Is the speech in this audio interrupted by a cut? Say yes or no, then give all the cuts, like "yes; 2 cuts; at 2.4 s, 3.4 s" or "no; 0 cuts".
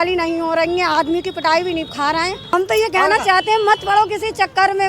yes; 1 cut; at 2.5 s